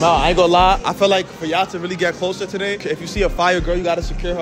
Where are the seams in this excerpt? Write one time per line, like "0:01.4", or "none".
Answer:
0:02.8